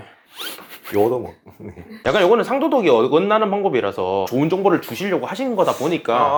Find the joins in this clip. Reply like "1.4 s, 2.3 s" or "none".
none

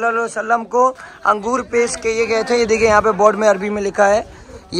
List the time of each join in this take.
none

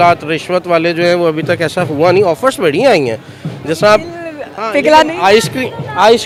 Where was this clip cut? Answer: none

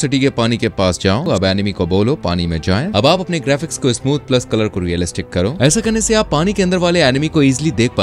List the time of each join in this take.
1.3 s, 2.9 s, 5.6 s

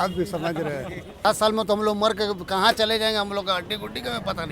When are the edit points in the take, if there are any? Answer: 1.2 s

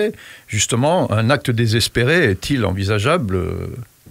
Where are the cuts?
none

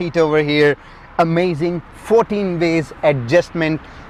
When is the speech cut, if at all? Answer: none

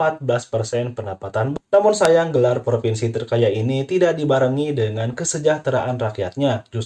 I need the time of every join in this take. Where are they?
1.5 s

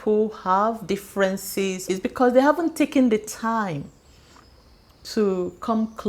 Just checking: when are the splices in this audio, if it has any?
1.9 s

